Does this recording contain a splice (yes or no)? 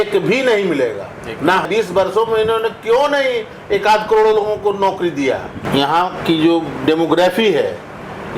yes